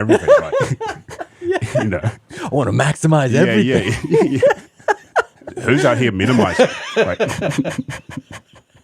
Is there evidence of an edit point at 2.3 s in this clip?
yes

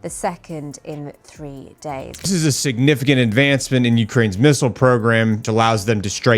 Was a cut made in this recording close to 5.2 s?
no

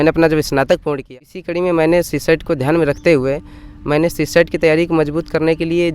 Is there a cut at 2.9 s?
no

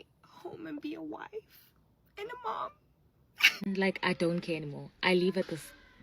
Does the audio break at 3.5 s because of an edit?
yes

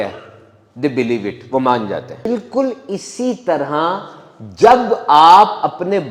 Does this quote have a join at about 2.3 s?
yes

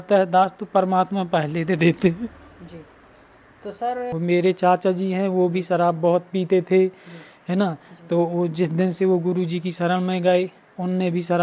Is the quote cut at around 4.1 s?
yes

